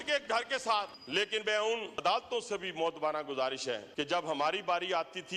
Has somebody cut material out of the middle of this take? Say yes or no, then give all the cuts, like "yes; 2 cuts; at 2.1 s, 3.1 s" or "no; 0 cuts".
yes; 3 cuts; at 1.0 s, 2.0 s, 3.9 s